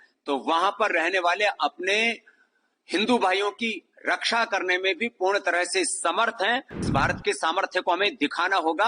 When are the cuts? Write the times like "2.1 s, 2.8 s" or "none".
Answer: 6.9 s